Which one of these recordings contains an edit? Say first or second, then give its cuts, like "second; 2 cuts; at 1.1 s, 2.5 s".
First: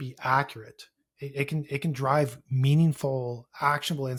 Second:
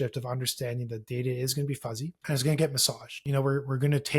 second; 2 cuts; at 2.2 s, 3.2 s